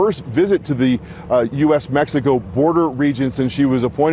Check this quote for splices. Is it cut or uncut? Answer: uncut